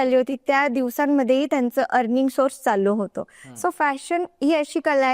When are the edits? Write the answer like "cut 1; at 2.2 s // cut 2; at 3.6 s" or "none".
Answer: none